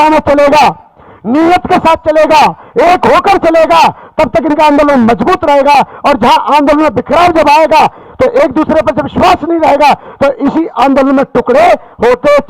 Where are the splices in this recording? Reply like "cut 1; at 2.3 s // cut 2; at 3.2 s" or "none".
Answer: none